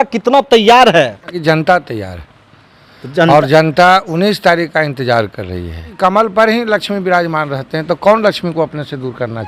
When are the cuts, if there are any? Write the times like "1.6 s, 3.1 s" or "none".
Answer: 1.4 s, 5.8 s